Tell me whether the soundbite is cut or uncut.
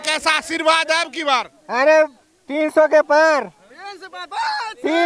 uncut